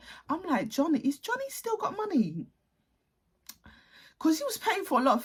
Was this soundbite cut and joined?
no; 0 cuts

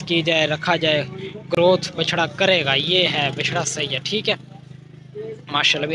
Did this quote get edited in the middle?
no; 0 cuts

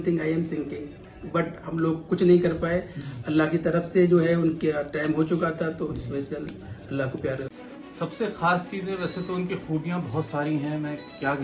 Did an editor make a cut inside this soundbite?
yes; 1 cut; at 7.5 s

